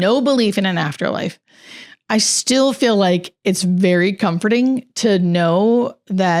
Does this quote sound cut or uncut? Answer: uncut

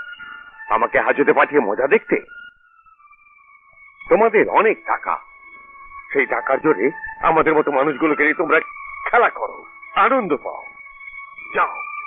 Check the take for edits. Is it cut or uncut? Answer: uncut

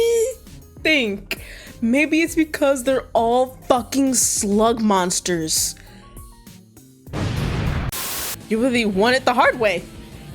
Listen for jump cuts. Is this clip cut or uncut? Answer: cut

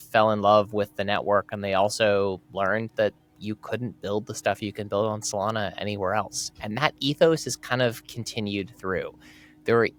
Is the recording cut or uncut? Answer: uncut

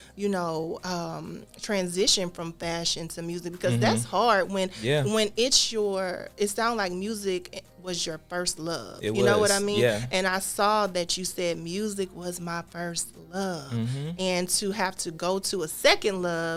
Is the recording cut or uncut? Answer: uncut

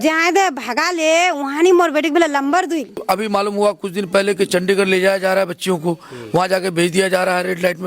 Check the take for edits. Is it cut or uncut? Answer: cut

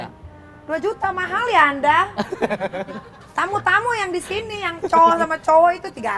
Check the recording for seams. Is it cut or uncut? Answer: uncut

